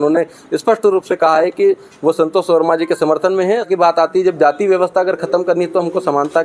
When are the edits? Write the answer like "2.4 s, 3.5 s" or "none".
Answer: 3.7 s